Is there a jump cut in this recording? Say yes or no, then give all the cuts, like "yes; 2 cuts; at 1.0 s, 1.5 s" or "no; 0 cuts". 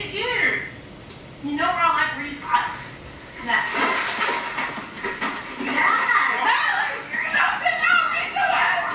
no; 0 cuts